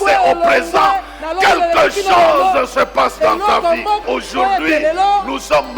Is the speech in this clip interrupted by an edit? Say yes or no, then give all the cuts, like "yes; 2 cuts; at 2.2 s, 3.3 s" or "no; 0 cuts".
yes; 1 cut; at 4.0 s